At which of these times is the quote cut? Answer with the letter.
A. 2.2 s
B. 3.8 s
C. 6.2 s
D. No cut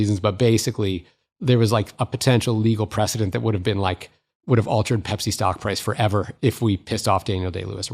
D